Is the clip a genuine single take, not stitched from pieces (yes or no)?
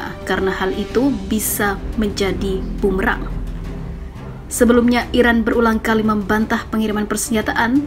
yes